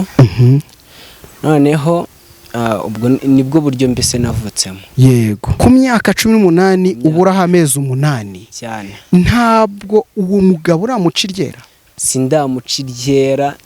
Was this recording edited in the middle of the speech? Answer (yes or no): yes